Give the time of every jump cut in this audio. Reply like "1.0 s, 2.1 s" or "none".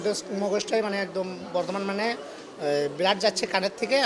none